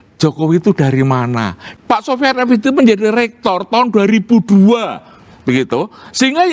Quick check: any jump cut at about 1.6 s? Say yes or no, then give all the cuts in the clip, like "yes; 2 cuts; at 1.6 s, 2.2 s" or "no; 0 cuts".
yes; 1 cut; at 1.6 s